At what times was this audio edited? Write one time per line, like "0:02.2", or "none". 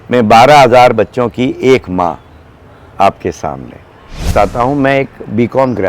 0:04.3